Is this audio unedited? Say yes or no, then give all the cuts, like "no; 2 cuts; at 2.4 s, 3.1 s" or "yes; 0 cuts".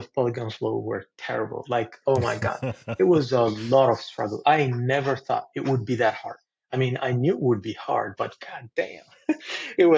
yes; 0 cuts